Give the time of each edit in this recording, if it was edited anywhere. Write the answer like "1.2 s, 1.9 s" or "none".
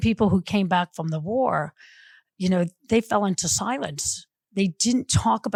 none